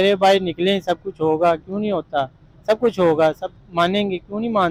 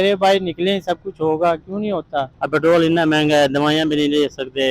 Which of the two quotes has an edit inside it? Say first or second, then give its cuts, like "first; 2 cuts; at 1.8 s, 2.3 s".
second; 1 cut; at 2.4 s